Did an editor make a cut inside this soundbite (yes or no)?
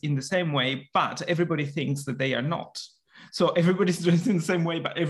no